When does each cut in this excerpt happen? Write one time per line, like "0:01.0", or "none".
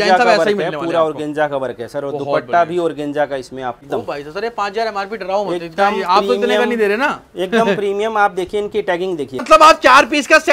0:03.9
0:09.4